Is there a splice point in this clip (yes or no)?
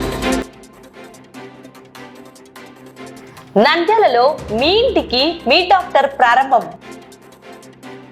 no